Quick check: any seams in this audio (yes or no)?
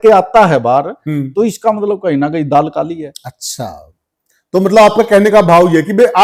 no